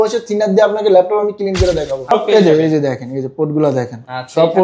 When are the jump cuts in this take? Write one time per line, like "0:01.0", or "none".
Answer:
0:02.1